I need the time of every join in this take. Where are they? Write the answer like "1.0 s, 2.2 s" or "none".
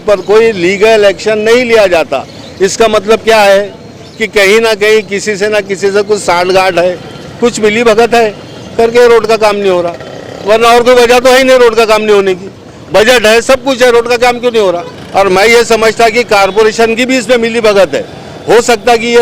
14.9 s